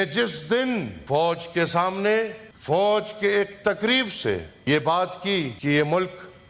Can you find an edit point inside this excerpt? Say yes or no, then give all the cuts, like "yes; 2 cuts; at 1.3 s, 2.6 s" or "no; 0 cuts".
yes; 4 cuts; at 1.0 s, 2.5 s, 4.5 s, 5.5 s